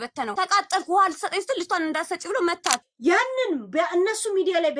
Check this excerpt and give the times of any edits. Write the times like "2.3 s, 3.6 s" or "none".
2.9 s